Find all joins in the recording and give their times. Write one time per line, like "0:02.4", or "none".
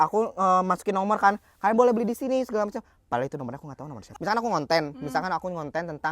0:04.1